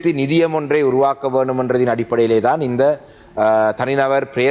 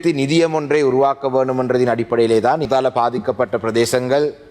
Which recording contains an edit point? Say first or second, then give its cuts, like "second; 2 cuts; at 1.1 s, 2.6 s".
second; 1 cut; at 2.7 s